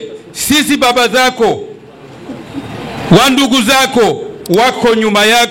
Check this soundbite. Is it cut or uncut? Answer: uncut